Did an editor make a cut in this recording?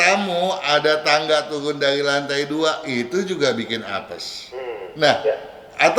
no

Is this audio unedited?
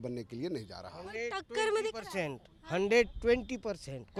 yes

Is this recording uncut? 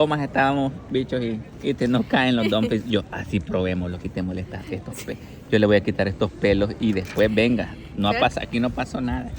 yes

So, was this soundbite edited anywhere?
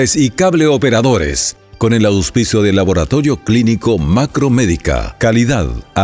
no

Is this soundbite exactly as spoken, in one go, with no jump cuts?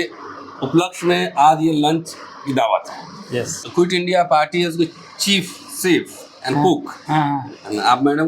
no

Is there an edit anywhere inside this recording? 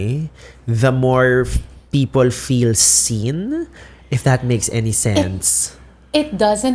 no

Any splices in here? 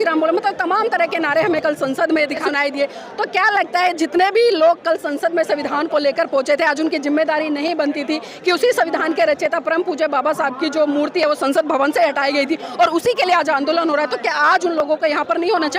yes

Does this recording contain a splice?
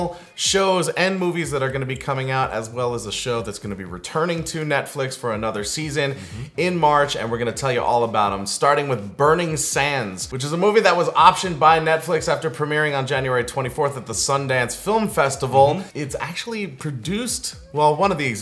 no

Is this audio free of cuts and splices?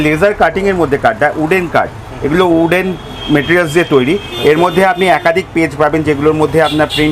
yes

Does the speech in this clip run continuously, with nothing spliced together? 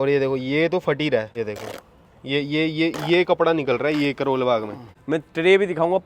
no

